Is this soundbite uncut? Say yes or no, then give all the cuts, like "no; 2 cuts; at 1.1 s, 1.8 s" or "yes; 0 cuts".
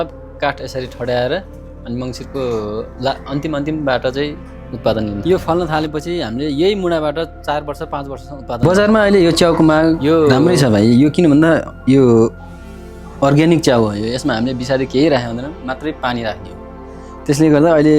no; 2 cuts; at 5.2 s, 8.6 s